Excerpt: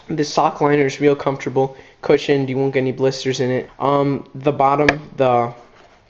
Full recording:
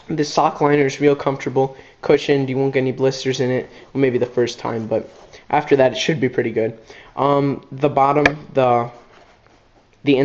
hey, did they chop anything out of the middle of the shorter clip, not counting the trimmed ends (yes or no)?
yes